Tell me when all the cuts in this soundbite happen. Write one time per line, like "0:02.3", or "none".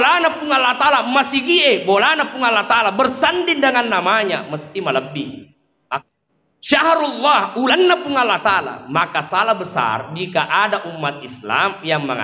0:06.0